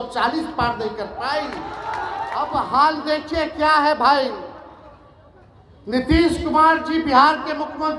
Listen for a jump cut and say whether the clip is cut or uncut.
cut